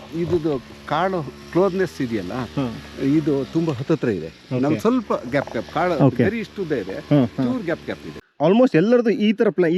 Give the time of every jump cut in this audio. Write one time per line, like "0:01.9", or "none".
0:08.2